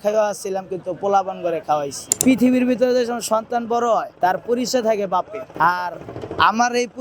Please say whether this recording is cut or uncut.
cut